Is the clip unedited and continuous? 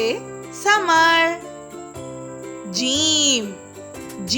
no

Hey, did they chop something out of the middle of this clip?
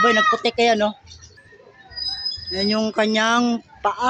yes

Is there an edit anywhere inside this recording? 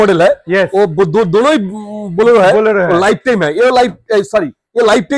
no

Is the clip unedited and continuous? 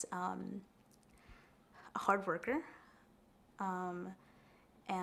yes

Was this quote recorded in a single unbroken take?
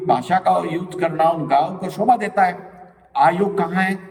yes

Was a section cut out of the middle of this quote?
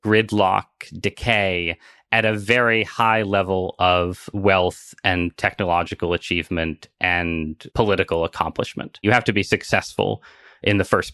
yes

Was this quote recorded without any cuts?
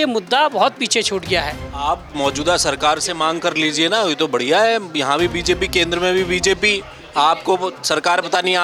yes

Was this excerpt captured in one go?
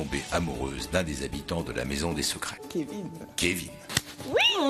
no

